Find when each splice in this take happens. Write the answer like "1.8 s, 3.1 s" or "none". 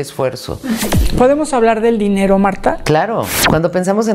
0.9 s, 3.3 s